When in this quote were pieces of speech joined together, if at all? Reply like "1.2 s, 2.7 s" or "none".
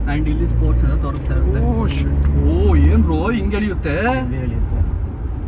none